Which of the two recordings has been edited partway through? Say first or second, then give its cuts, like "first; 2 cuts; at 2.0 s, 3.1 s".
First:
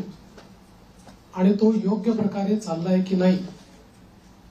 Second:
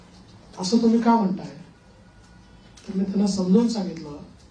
first; 1 cut; at 3.1 s